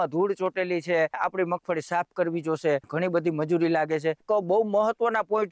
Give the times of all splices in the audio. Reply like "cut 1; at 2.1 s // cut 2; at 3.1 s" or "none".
cut 1; at 1.2 s // cut 2; at 2.9 s // cut 3; at 4.2 s

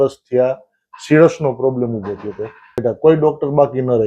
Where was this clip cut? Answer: cut 1; at 2.7 s

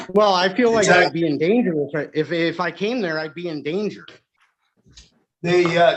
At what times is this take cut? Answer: none

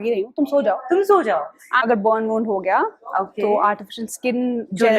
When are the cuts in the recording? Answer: cut 1; at 1.8 s

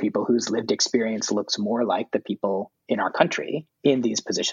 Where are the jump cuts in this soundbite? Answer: cut 1; at 2.7 s // cut 2; at 3.7 s

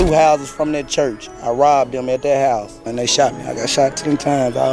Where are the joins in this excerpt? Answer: cut 1; at 2.9 s

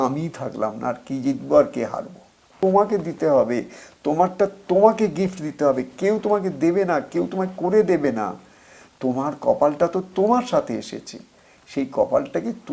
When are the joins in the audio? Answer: cut 1; at 2.5 s

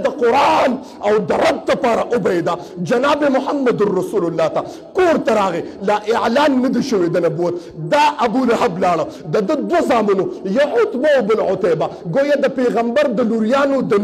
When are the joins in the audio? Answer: none

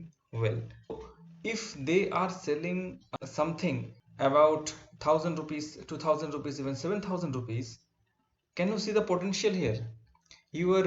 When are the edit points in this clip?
cut 1; at 1.0 s // cut 2; at 3.0 s // cut 3; at 4.0 s

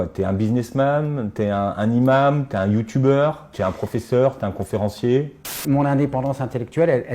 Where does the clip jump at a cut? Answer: cut 1; at 3.4 s // cut 2; at 5.6 s

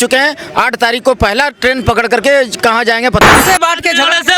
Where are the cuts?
cut 1; at 3.4 s

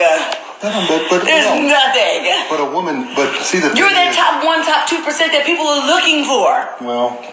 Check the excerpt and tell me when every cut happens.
none

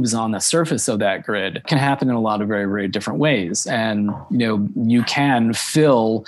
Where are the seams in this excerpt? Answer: cut 1; at 1.7 s

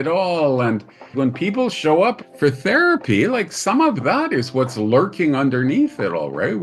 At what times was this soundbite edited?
cut 1; at 1.1 s // cut 2; at 2.3 s

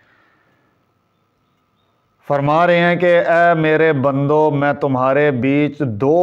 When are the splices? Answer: none

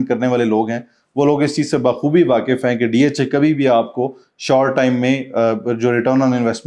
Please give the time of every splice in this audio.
none

